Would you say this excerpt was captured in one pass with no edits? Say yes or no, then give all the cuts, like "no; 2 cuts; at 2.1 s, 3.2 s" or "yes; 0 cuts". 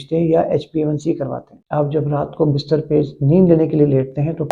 no; 1 cut; at 1.5 s